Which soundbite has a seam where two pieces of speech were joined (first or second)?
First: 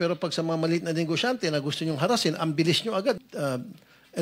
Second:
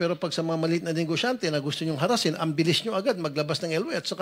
first